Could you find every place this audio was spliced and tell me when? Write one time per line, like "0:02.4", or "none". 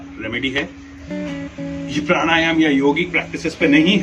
0:01.1